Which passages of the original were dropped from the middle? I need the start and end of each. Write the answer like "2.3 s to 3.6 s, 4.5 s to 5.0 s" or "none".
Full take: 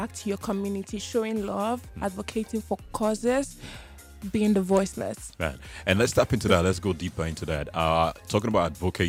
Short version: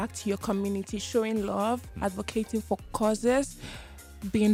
none